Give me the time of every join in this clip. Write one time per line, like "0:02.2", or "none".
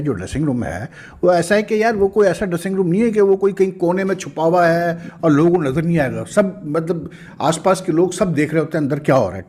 none